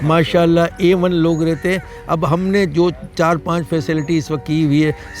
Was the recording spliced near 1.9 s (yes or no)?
no